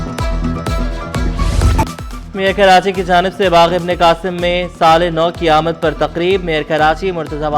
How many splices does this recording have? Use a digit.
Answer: 0